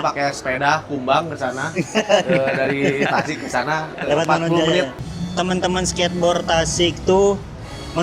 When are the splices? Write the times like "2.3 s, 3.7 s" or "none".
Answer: 5.0 s